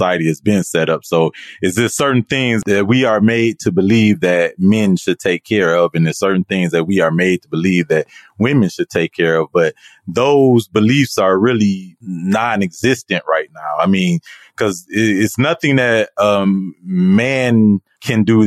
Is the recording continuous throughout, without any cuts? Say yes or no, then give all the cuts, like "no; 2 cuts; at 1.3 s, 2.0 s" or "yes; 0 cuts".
yes; 0 cuts